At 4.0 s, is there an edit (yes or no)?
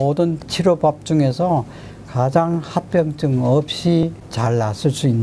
yes